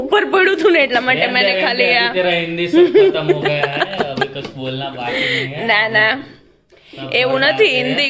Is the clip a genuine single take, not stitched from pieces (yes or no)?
yes